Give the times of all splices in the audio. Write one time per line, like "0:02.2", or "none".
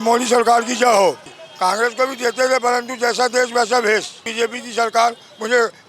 0:01.4
0:04.2